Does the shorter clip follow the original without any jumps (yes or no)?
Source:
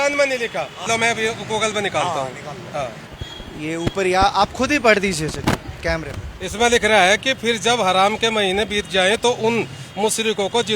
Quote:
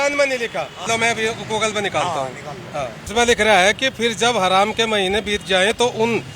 no